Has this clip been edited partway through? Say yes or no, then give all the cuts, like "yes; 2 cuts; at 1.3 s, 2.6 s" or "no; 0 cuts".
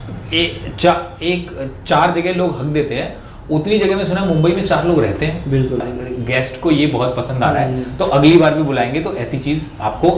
yes; 1 cut; at 5.9 s